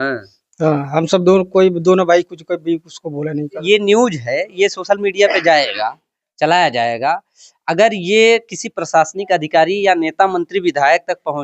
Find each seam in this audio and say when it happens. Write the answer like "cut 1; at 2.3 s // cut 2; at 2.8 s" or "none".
cut 1; at 3.5 s